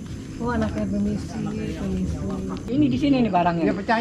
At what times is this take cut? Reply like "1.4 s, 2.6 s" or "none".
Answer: 2.6 s